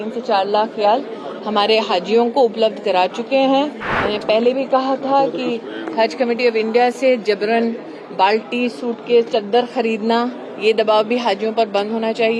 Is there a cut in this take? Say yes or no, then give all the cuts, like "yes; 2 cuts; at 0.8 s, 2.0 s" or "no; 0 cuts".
yes; 1 cut; at 3.9 s